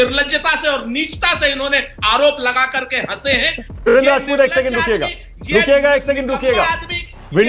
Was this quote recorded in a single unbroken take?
no; 1 cut; at 3.7 s

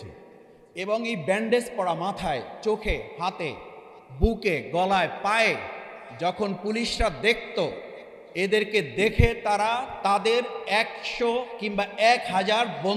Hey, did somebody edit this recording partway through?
no; 0 cuts

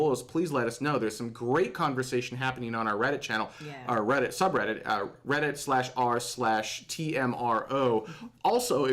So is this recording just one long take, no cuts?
no; 1 cut; at 4.7 s

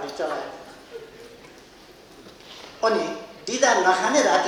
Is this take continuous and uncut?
yes; 0 cuts

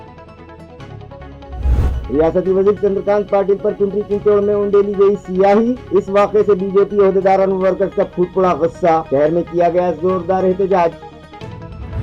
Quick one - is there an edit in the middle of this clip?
no; 0 cuts

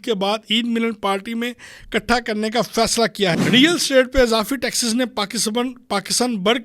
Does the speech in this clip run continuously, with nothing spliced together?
no; 1 cut; at 3.4 s

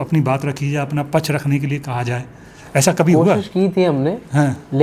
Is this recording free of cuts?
no; 1 cut; at 3.1 s

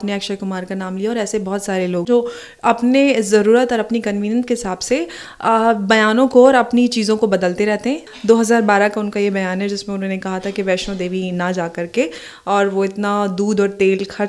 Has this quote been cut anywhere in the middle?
yes; 2 cuts; at 2.1 s, 8.1 s

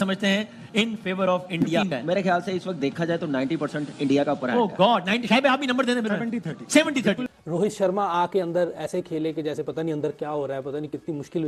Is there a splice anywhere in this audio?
yes; 2 cuts; at 1.8 s, 7.2 s

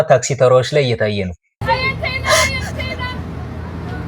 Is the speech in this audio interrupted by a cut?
yes; 1 cut; at 1.4 s

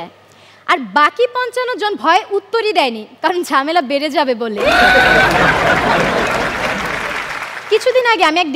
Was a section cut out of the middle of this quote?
no; 0 cuts

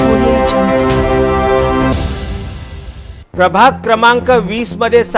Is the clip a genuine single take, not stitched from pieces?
yes; 0 cuts

